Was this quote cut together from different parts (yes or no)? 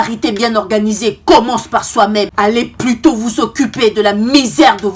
no